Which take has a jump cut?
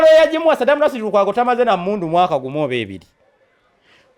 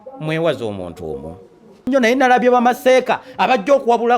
second; 1 cut; at 1.9 s

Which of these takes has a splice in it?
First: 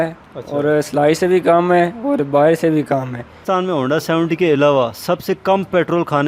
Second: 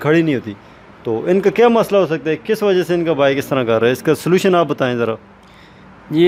first; 1 cut; at 3.4 s

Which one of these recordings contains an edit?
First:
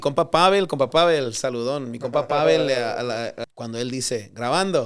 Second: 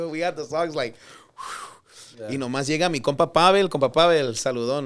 first; 1 cut; at 3.4 s

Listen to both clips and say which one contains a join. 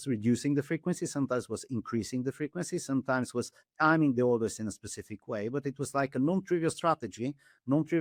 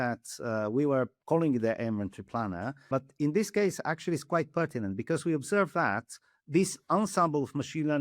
second; 2 cuts; at 1.2 s, 2.9 s

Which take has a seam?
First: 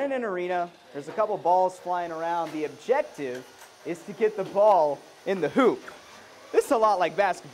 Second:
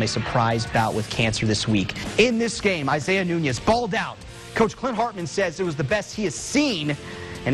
second; 1 cut; at 2.0 s

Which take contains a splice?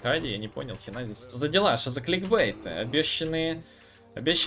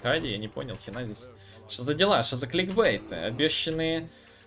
first; 1 cut; at 1.2 s

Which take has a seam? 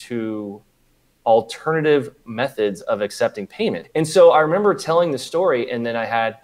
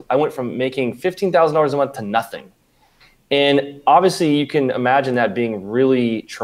first; 1 cut; at 3.8 s

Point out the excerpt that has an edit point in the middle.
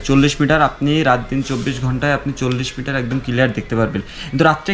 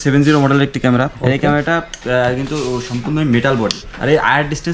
second; 2 cuts; at 1.1 s, 3.8 s

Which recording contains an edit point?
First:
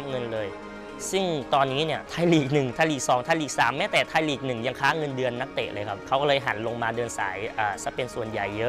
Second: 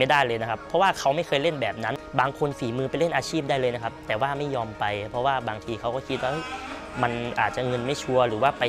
second; 1 cut; at 1.9 s

